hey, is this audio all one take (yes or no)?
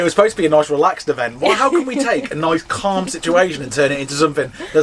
yes